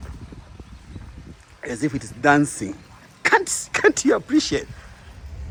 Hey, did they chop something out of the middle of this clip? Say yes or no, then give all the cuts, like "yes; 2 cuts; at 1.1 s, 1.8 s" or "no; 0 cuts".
no; 0 cuts